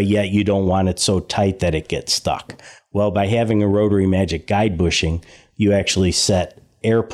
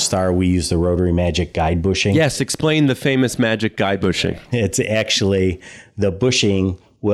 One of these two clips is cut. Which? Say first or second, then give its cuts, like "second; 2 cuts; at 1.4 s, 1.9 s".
second; 2 cuts; at 2.1 s, 4.4 s